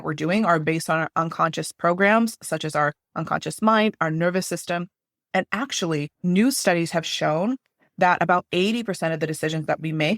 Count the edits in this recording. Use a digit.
1